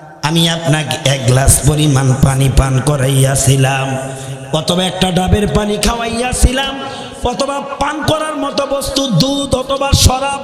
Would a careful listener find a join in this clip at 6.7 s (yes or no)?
no